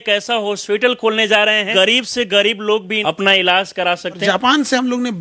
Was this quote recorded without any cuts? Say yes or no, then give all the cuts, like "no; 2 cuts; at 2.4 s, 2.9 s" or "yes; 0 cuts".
no; 3 cuts; at 1.7 s, 2.9 s, 4.2 s